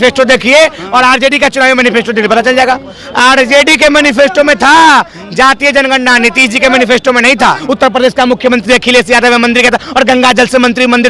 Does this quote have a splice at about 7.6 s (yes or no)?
yes